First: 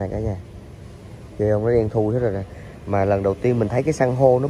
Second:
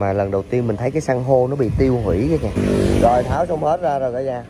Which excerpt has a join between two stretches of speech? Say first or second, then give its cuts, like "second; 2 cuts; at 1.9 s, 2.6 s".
second; 1 cut; at 2.6 s